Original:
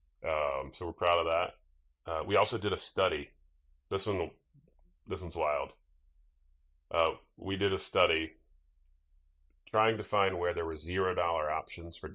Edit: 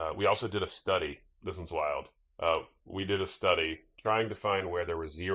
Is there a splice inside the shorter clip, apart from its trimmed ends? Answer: yes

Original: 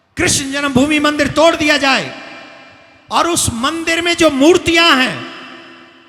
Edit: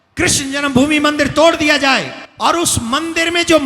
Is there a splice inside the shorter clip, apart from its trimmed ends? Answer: yes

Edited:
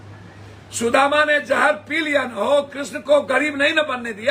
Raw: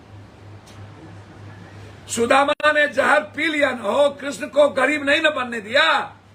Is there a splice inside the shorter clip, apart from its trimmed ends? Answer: yes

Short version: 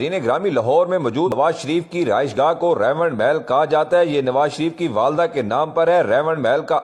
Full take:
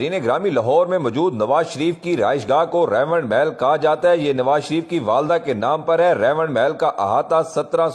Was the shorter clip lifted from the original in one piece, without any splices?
no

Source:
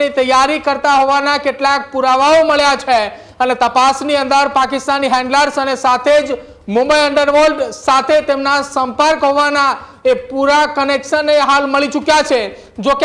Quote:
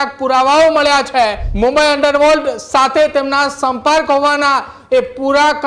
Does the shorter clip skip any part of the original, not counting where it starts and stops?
yes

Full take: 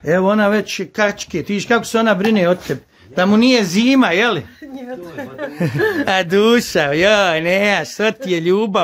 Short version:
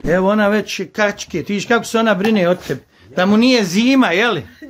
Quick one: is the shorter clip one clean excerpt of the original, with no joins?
yes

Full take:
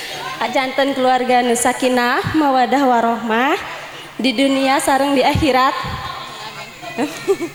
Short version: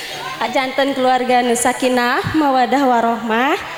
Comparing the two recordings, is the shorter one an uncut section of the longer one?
yes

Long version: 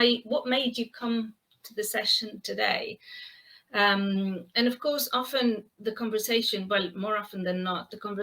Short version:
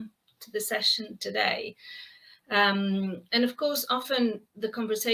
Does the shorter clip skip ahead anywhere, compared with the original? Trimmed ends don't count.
no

